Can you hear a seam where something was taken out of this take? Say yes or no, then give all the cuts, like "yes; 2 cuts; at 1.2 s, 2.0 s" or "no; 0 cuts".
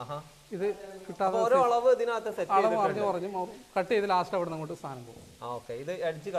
no; 0 cuts